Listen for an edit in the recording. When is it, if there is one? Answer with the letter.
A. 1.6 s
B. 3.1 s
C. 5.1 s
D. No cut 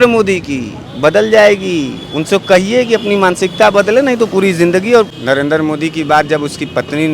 C